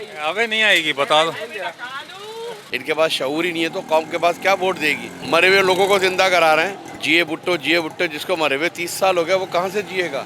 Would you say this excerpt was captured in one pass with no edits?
no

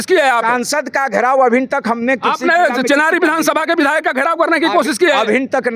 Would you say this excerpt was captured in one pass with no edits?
yes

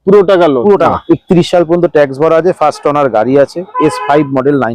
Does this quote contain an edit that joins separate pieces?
yes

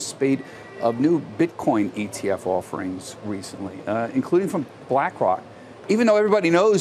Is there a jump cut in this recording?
no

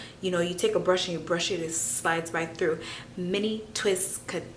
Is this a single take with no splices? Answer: yes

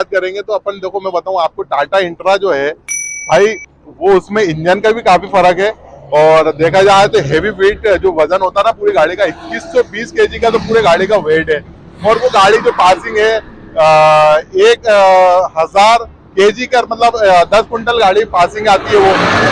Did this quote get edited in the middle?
no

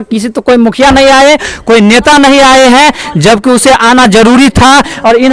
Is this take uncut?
yes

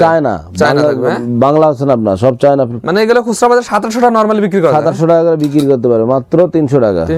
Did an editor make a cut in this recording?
no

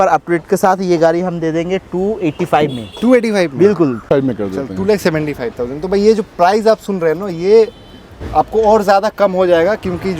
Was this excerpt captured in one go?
no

